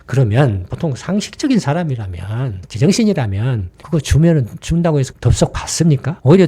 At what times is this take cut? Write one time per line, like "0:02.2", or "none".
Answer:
0:05.1